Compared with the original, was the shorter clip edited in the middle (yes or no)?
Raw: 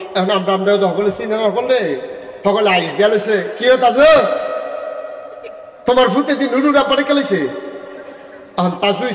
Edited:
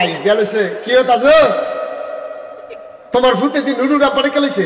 no